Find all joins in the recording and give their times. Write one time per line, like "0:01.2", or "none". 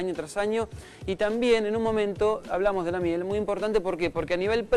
0:02.2

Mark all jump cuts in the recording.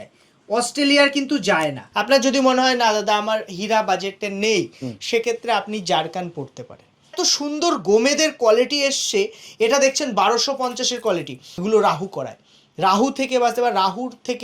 0:01.9
0:07.1
0:11.4

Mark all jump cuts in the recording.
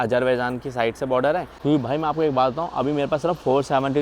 0:01.5

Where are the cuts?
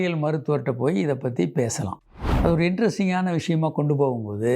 0:02.0

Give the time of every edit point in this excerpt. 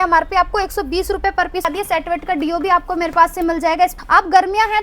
0:01.6
0:03.9

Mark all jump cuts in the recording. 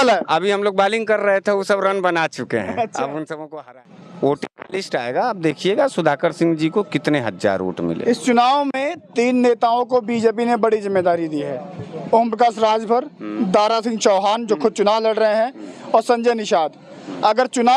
0:03.4

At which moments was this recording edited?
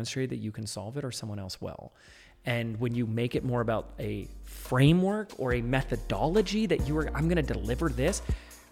none

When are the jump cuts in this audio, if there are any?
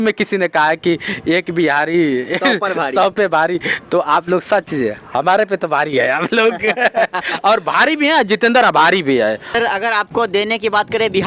0:09.6

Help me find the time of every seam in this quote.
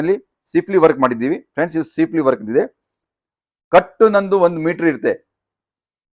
none

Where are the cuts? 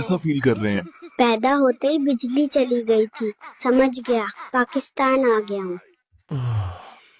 none

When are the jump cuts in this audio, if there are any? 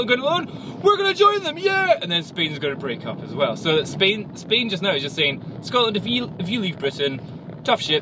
none

